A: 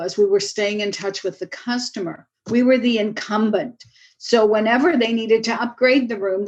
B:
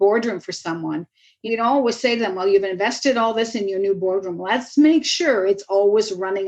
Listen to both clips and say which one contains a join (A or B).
B